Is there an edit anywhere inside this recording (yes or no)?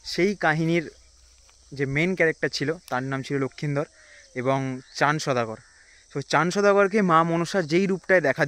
no